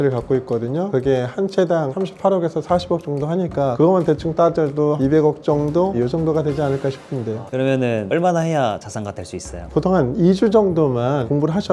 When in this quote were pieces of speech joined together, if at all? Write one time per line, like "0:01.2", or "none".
0:03.7
0:07.4